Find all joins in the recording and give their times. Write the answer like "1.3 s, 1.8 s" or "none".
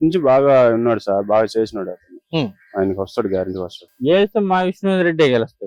3.8 s